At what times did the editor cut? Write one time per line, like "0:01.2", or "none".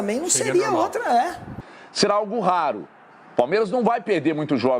0:01.5